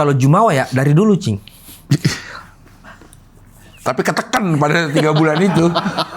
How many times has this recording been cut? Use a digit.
1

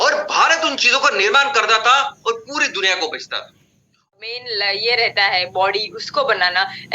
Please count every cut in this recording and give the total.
1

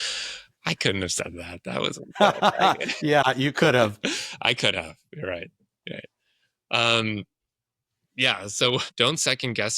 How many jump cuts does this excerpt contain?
1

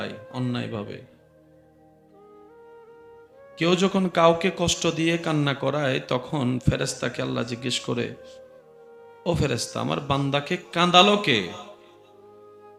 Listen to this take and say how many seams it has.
0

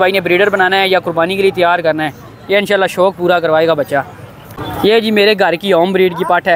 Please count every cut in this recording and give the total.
1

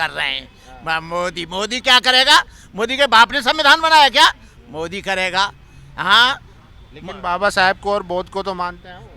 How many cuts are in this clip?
0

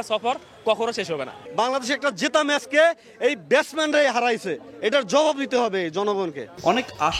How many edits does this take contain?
0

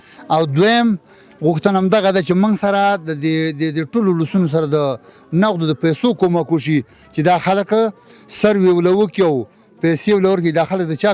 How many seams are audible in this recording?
0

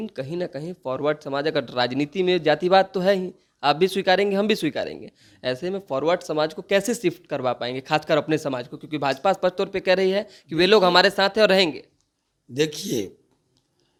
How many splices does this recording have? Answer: 0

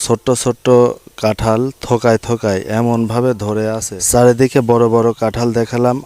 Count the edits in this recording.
1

